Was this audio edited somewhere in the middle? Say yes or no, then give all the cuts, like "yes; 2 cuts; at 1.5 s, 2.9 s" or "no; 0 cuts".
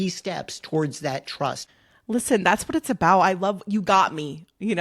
yes; 1 cut; at 1.6 s